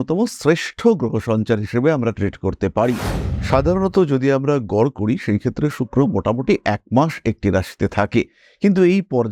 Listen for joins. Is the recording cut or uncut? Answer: cut